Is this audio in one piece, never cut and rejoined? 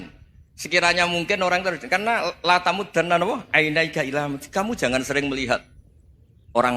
yes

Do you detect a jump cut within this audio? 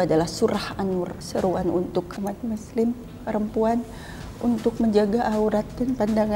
yes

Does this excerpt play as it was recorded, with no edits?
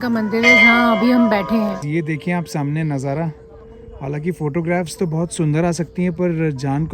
no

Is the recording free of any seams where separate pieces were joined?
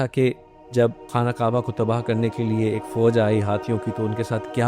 no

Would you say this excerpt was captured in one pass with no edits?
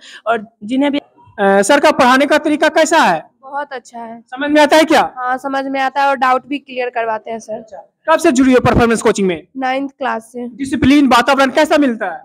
no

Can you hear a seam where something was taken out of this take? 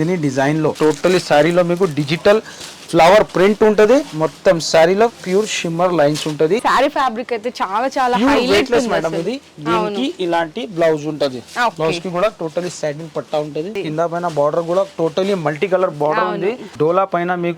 yes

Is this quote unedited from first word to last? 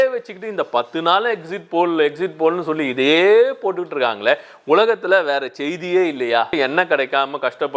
no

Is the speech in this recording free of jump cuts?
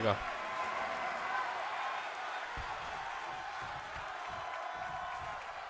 yes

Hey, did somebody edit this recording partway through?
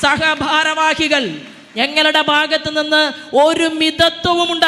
no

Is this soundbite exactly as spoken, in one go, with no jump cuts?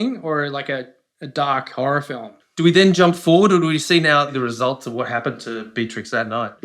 no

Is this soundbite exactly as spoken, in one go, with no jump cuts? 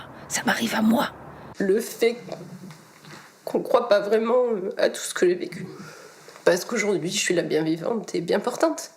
no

